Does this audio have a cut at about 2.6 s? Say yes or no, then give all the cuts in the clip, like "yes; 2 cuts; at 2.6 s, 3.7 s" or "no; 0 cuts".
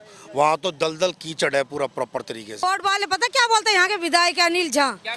yes; 1 cut; at 2.6 s